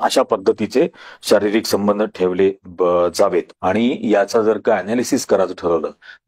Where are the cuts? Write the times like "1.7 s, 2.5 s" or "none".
3.5 s